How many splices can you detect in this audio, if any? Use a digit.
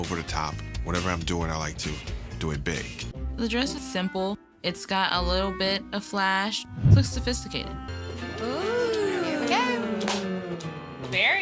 0